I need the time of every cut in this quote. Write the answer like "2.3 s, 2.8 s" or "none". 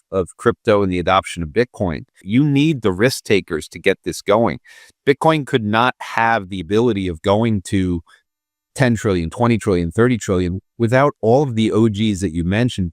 2.2 s